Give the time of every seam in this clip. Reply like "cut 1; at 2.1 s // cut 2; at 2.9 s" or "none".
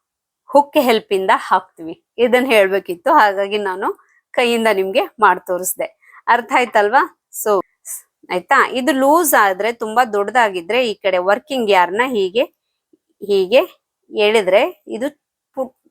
cut 1; at 7.7 s